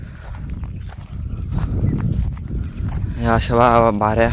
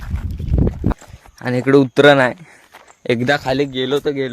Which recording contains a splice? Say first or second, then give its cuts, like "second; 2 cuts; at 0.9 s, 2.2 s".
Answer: second; 1 cut; at 0.9 s